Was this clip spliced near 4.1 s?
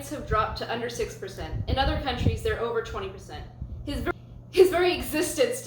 yes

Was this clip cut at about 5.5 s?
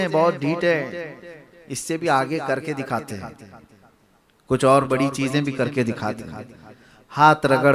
no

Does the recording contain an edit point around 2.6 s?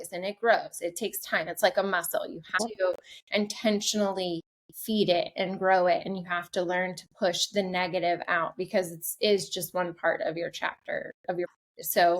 yes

